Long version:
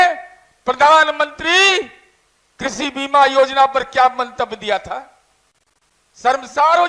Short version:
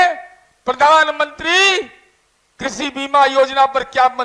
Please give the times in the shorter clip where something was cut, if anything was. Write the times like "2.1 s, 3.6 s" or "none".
none